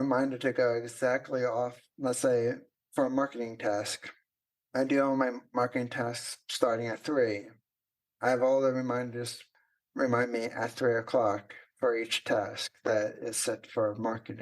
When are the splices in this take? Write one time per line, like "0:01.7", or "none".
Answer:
0:02.7